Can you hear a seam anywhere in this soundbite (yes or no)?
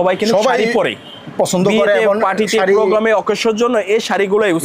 no